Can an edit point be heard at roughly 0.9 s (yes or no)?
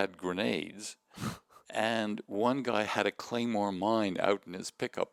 no